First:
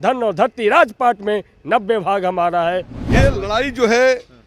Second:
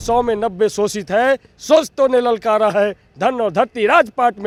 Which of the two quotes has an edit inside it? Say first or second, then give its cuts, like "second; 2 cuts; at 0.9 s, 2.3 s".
first; 1 cut; at 3.0 s